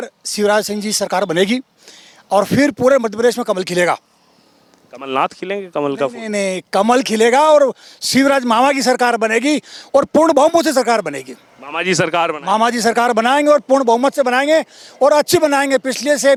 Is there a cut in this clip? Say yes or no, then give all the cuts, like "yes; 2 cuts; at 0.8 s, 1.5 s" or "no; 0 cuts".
no; 0 cuts